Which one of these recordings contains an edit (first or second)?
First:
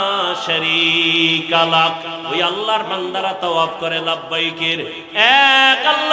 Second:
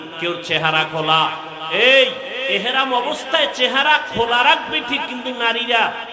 first